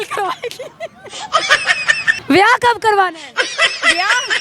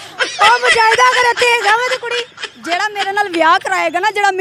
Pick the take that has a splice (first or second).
first